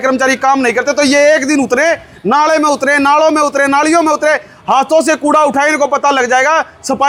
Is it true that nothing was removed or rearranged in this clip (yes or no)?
yes